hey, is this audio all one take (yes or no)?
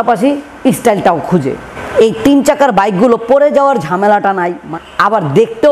no